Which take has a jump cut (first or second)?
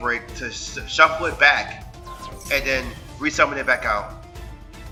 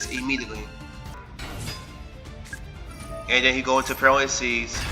second